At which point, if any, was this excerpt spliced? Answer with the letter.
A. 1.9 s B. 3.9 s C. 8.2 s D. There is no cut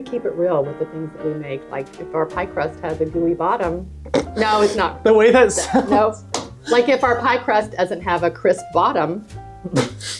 B